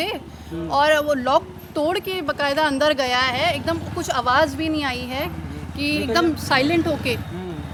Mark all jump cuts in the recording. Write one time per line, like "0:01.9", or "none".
none